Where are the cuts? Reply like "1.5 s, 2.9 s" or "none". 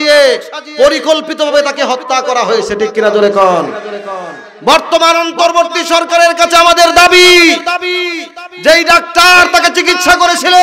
none